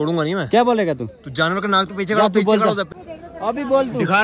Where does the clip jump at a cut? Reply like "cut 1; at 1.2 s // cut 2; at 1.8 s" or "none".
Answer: cut 1; at 2.9 s